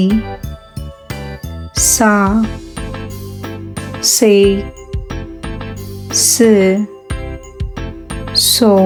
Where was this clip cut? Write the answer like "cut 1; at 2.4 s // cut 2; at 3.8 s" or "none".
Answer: none